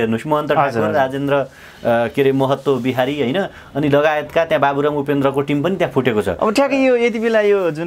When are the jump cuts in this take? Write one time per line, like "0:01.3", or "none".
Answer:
none

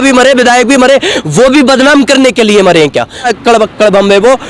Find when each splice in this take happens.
0:03.3

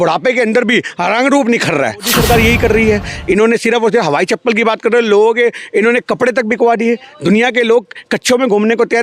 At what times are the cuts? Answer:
0:02.1

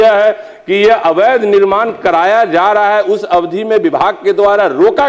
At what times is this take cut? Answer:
none

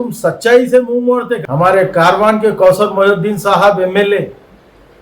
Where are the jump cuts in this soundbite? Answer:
0:01.4

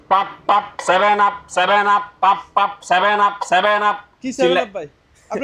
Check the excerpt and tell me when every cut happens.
none

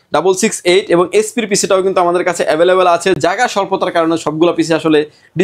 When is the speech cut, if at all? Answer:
none

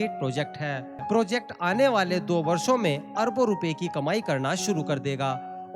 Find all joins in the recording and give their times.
0:01.0

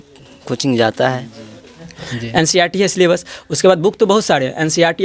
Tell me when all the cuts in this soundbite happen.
0:02.0

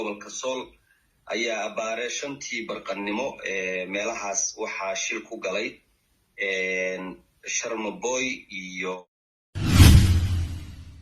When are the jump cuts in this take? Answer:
0:09.1

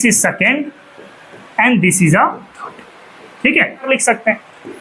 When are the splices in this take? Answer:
0:03.8

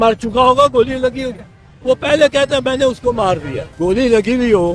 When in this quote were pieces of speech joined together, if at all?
0:03.6

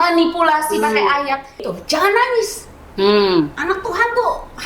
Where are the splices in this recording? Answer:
0:01.7

